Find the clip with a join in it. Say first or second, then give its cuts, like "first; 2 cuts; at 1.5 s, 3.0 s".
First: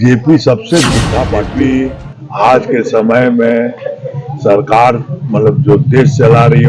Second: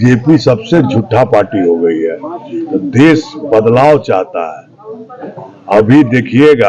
first; 1 cut; at 1.4 s